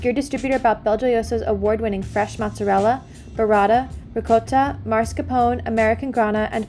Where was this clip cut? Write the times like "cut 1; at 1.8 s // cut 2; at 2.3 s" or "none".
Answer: none